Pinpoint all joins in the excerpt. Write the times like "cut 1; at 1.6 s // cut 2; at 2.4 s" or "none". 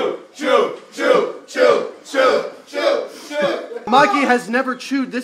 cut 1; at 3.9 s